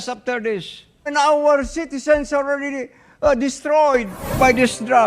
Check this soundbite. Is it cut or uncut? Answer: cut